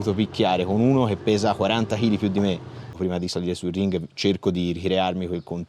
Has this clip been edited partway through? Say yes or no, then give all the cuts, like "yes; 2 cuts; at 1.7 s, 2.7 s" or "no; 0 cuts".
yes; 1 cut; at 2.9 s